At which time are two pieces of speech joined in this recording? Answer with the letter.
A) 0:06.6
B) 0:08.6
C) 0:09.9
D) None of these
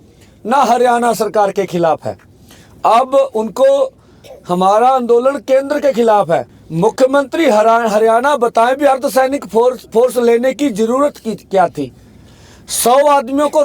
A